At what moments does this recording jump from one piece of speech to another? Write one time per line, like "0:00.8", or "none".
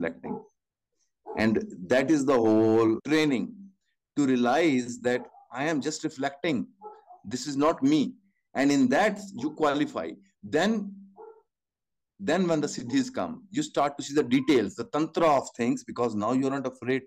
0:03.0

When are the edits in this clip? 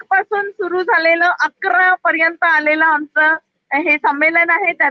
none

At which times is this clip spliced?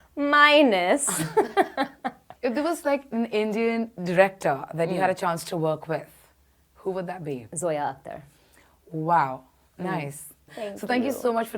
none

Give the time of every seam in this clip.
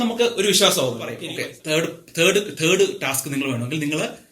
0:01.2

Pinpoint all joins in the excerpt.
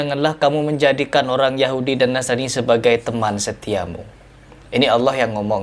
none

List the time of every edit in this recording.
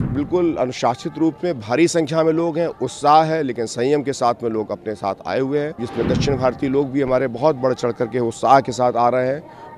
0:05.9

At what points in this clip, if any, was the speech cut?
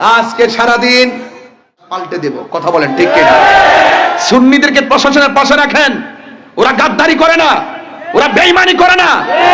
0:01.7

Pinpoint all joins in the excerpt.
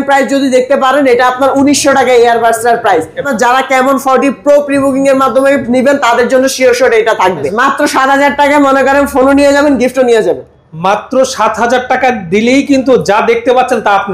0:03.3
0:07.5

